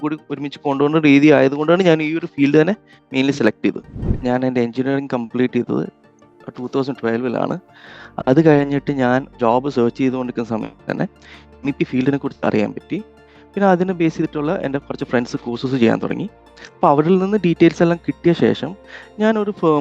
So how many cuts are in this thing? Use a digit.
2